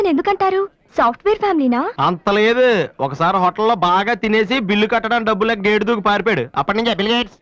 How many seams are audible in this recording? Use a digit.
0